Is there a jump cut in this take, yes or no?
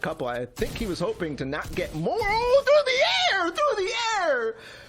no